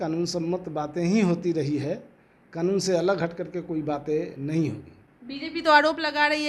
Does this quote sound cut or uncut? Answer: uncut